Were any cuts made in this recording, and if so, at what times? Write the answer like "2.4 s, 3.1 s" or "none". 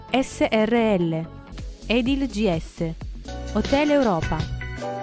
none